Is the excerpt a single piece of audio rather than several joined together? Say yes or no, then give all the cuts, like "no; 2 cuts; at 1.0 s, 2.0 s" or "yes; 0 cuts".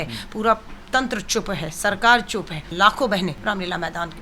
no; 2 cuts; at 2.7 s, 3.4 s